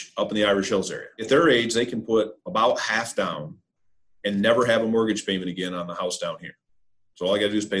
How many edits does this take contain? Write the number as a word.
one